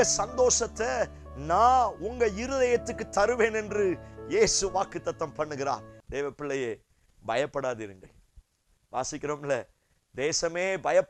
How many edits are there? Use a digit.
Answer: 1